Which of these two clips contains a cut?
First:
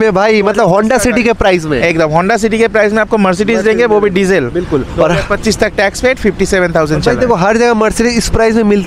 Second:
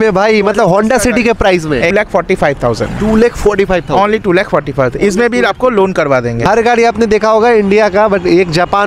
second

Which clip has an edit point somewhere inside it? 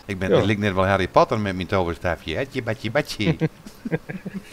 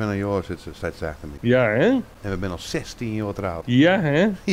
second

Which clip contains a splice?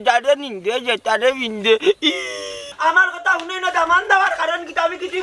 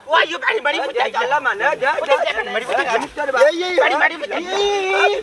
first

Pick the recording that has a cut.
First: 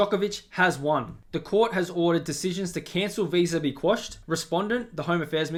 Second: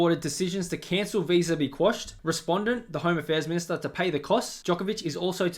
second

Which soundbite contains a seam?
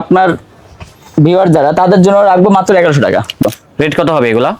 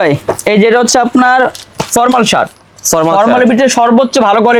first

